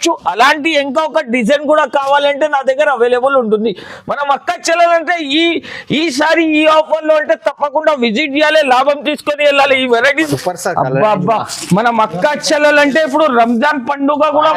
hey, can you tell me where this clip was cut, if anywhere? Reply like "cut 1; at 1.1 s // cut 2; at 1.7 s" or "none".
cut 1; at 10.2 s

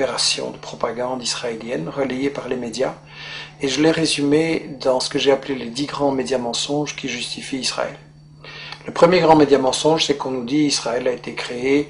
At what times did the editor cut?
cut 1; at 5.6 s

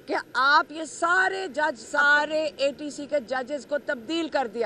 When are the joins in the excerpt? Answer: cut 1; at 1.8 s

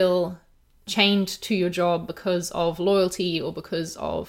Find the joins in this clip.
none

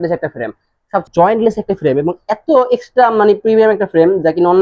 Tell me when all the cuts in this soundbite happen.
cut 1; at 1.0 s

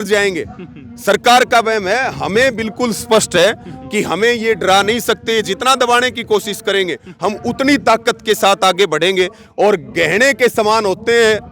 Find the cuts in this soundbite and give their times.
none

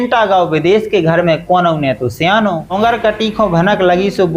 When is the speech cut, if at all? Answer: cut 1; at 2.7 s

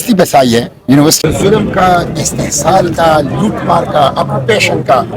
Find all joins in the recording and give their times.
cut 1; at 1.2 s

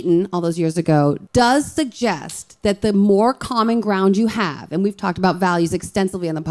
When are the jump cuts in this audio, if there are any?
cut 1; at 1.2 s

